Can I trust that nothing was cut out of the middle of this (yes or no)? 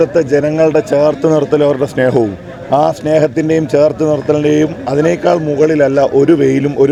yes